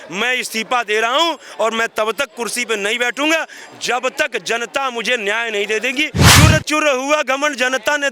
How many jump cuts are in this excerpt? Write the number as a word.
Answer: one